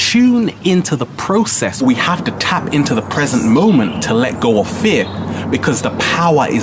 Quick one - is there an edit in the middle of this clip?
yes; 1 cut; at 1.8 s

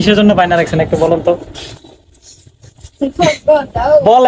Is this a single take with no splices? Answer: yes; 0 cuts

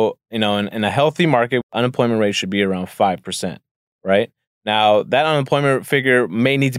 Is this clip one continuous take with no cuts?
no; 1 cut; at 1.8 s

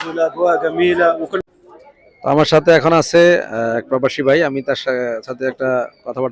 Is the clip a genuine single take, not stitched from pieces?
no; 1 cut; at 1.4 s

